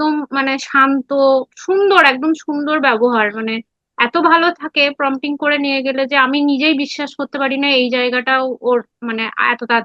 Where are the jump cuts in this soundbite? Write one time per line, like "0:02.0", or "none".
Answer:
0:01.5